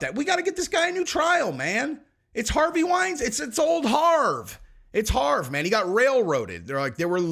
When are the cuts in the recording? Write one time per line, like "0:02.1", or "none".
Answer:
none